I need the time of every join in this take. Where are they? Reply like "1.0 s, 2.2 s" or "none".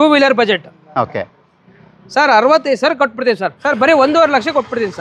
3.5 s